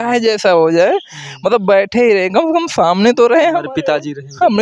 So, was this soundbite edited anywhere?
no; 0 cuts

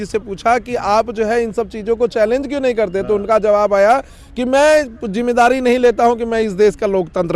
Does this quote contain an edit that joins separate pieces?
no; 0 cuts

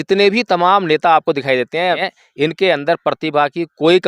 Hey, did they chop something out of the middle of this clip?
yes; 1 cut; at 2.0 s

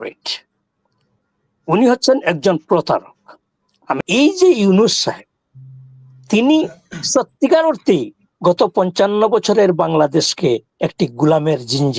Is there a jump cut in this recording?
yes; 1 cut; at 4.0 s

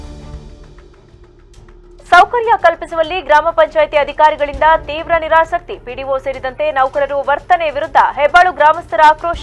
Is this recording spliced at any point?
yes; 1 cut; at 0.9 s

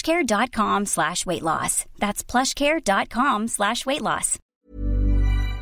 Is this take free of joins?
no; 1 cut; at 4.4 s

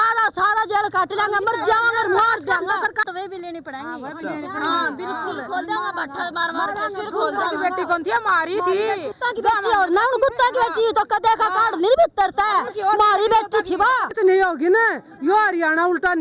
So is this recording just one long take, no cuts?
no; 3 cuts; at 3.0 s, 9.1 s, 14.1 s

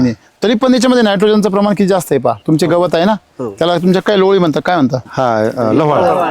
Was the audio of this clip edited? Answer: yes; 2 cuts; at 2.4 s, 5.1 s

